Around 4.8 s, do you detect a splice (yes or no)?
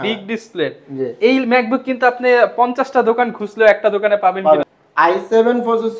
yes